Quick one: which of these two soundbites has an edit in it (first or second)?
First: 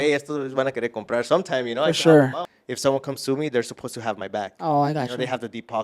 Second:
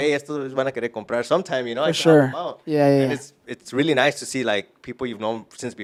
first